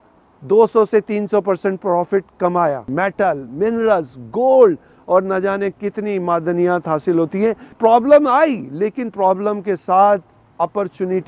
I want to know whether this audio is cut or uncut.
cut